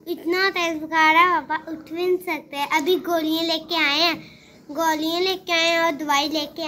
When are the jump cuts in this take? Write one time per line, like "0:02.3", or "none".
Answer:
none